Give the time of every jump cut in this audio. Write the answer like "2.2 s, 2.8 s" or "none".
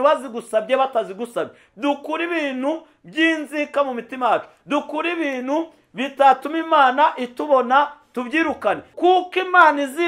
8.9 s

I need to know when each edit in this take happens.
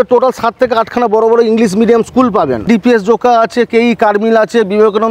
2.7 s

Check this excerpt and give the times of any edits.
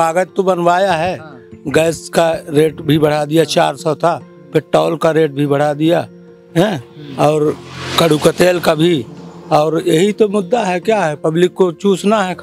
none

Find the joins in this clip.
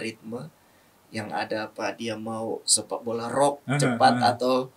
none

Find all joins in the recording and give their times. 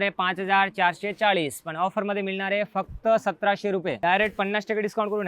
4.0 s

